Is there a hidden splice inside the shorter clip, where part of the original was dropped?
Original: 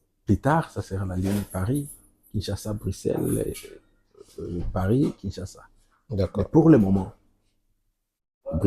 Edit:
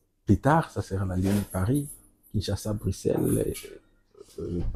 no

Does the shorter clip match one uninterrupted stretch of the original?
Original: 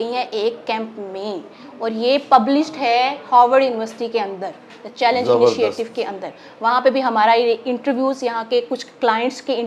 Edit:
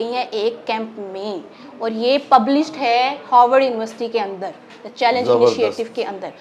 yes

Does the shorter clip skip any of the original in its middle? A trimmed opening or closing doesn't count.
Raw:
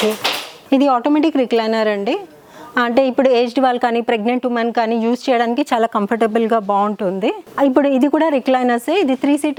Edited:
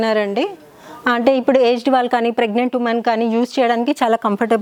no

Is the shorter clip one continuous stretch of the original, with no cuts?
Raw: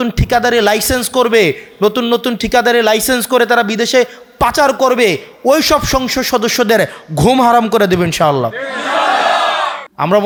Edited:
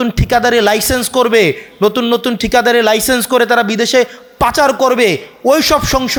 yes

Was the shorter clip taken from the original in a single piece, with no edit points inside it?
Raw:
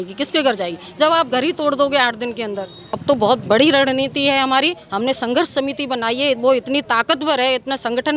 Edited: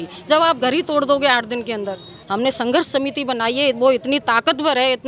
no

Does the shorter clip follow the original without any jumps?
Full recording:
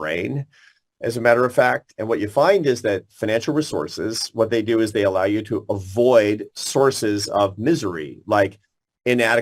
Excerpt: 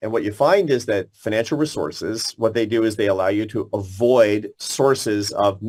yes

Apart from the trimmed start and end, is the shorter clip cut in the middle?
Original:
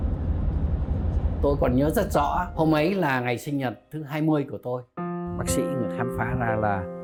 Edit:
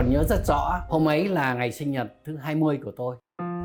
no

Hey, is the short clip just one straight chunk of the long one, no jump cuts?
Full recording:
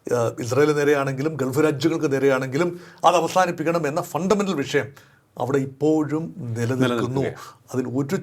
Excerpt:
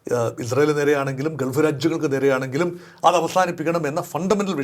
yes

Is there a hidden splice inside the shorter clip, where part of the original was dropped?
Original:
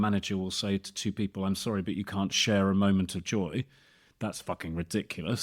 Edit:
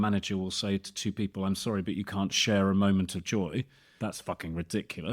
yes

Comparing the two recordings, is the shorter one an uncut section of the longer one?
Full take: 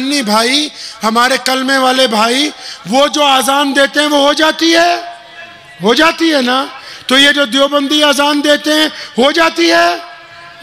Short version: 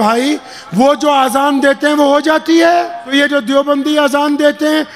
no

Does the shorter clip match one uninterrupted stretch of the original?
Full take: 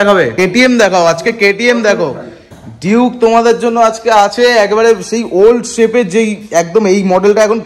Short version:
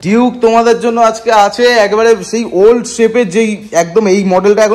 yes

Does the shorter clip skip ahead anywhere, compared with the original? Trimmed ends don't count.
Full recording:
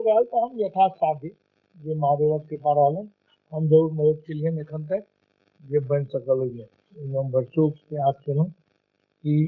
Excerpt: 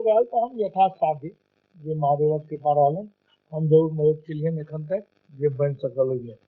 yes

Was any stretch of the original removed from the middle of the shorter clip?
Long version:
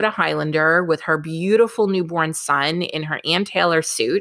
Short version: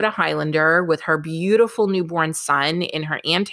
no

